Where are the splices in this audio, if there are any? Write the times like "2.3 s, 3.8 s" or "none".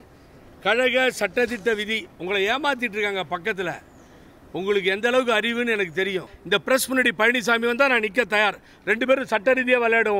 6.3 s